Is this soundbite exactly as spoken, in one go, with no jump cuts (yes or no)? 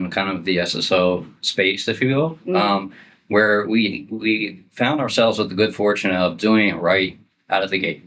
yes